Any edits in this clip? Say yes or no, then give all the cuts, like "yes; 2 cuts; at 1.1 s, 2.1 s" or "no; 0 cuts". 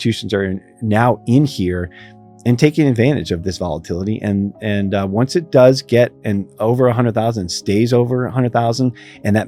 no; 0 cuts